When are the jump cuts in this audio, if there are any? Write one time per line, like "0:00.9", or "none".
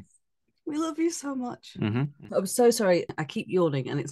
0:02.1
0:03.2